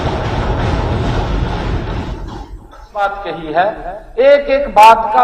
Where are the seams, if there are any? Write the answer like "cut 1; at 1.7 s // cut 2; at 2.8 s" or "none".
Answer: cut 1; at 2.9 s